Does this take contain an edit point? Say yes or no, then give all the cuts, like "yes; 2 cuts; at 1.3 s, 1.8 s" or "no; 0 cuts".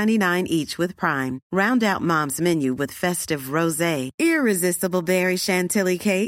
no; 0 cuts